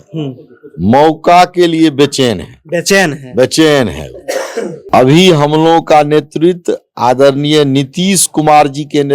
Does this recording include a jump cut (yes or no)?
yes